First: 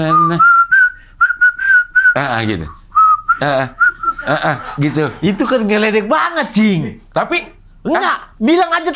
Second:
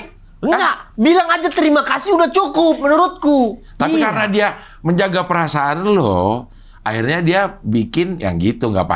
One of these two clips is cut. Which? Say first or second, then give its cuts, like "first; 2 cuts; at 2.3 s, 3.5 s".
second; 1 cut; at 3.6 s